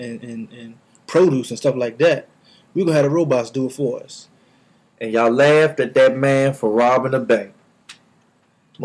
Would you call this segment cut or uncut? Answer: uncut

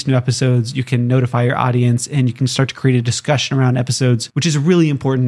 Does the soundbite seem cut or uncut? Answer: cut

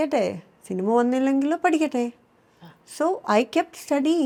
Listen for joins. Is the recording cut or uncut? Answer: uncut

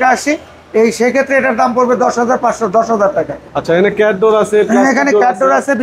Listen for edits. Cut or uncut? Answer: uncut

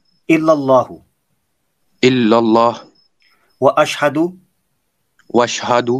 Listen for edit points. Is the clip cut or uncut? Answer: uncut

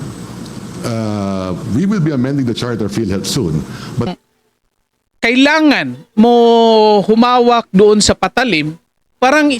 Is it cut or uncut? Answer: cut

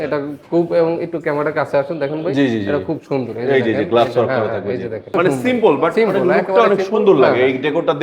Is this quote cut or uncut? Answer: cut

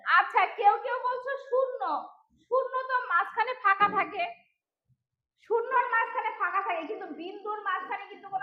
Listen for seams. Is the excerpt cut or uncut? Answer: uncut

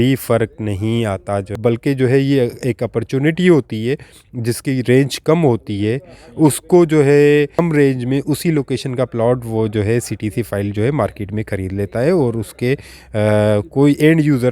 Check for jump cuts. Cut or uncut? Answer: cut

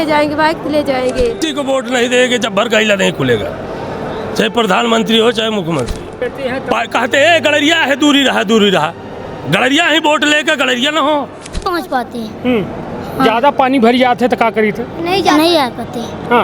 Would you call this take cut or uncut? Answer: cut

